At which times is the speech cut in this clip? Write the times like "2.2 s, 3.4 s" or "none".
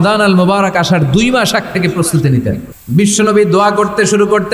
2.7 s